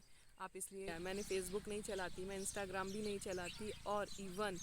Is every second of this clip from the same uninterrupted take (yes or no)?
no